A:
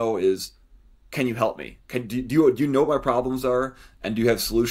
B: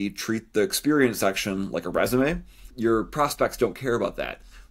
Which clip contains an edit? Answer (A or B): B